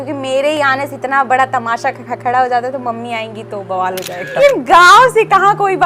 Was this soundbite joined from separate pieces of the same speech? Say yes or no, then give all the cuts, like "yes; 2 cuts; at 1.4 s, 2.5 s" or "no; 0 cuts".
yes; 1 cut; at 4.4 s